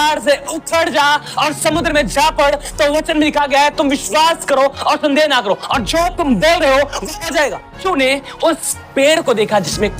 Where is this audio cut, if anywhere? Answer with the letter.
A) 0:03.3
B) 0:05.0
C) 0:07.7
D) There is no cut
C